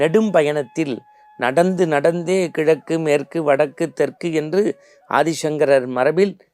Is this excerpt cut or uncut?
uncut